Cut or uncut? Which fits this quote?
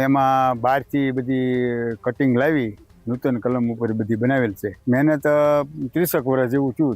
cut